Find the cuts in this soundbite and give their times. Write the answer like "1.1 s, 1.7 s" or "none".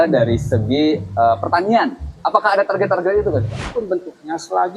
2.1 s, 3.6 s